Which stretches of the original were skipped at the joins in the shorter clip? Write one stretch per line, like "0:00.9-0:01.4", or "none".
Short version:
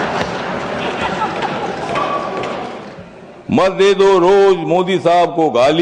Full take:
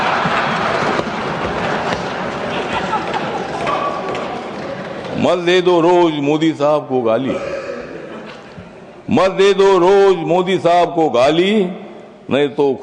0:04.6-0:08.5